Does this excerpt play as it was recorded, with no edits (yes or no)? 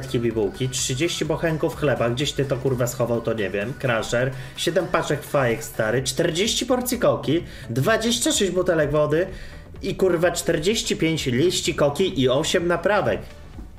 yes